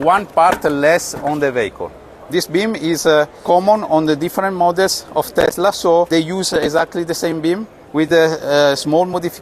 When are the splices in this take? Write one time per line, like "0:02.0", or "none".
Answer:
0:02.1
0:03.4
0:06.1
0:07.8

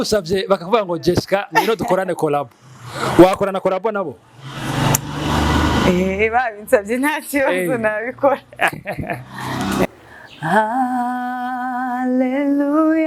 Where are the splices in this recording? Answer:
0:09.8

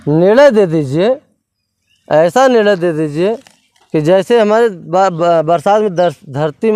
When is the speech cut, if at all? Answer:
none

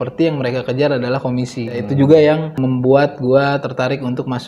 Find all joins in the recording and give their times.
0:01.8
0:02.6

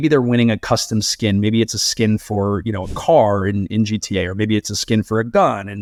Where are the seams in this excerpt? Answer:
none

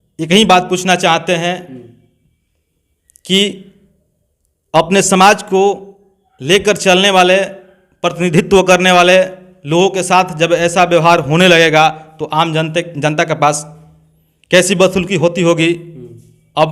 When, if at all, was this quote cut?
none

